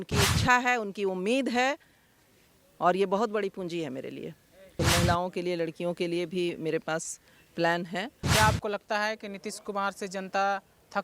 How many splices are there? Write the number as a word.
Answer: two